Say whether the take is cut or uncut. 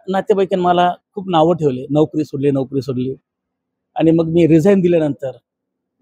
uncut